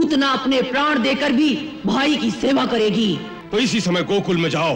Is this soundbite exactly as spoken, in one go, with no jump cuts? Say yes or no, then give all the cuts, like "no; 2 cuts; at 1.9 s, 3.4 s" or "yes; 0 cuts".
no; 1 cut; at 3.3 s